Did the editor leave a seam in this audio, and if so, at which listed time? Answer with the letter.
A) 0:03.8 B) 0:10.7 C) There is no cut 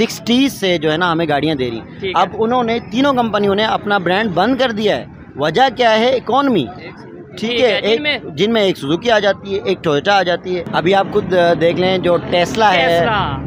B